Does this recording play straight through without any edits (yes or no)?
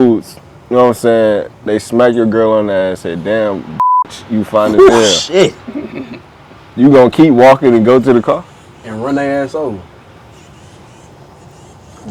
yes